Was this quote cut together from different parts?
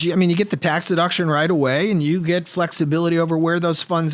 no; 0 cuts

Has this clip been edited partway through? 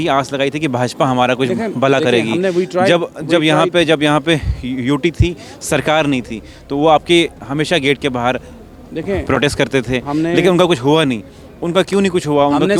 no; 0 cuts

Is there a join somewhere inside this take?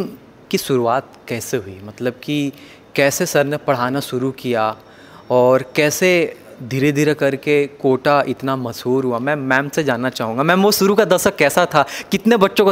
no; 0 cuts

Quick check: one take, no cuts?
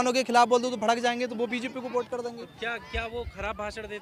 yes; 0 cuts

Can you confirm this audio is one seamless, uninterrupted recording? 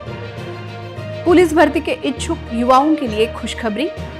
no; 1 cut; at 1.0 s

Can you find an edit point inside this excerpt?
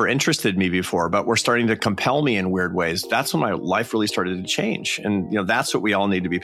no; 0 cuts

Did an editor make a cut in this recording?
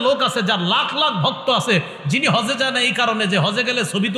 no; 0 cuts

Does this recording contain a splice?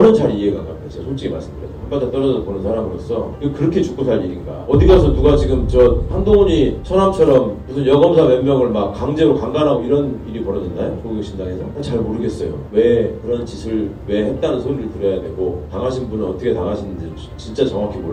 no; 0 cuts

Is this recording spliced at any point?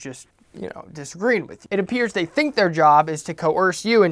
yes; 1 cut; at 1.6 s

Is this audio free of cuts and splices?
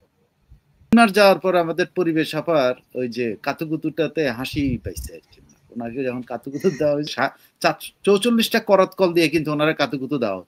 no; 2 cuts; at 0.9 s, 7.1 s

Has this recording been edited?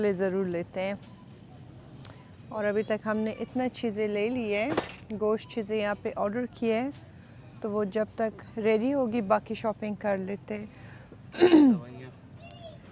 no; 0 cuts

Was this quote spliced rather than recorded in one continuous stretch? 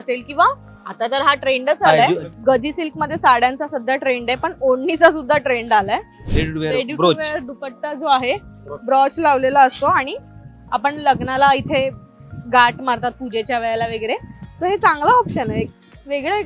yes; 2 cuts; at 2.3 s, 6.2 s

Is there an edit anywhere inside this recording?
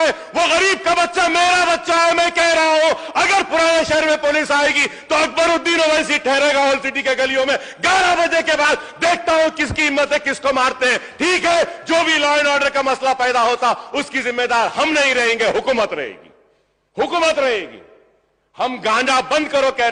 no; 0 cuts

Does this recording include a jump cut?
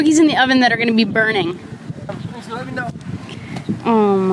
yes; 1 cut; at 2.1 s

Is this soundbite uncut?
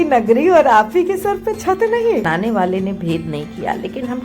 no; 1 cut; at 2.2 s

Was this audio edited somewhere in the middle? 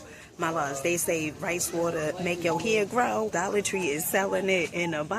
yes; 1 cut; at 3.3 s

